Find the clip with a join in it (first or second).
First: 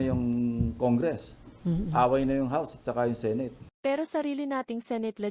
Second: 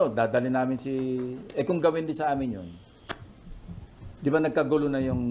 first